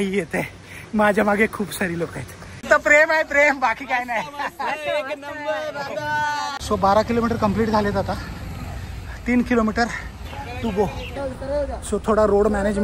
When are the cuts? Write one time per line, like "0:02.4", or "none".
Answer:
0:02.6
0:06.6
0:11.1